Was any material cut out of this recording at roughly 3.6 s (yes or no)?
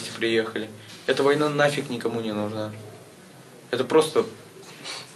yes